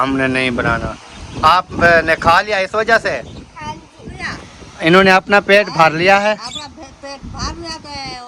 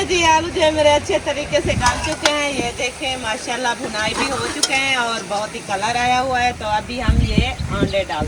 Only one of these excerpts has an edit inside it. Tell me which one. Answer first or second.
first